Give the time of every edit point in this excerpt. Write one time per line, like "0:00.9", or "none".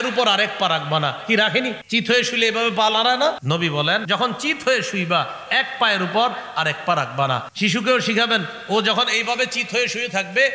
0:01.8
0:03.9
0:07.5